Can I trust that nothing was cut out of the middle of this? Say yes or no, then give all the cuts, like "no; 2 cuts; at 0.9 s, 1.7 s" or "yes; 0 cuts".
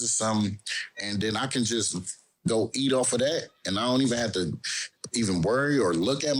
yes; 0 cuts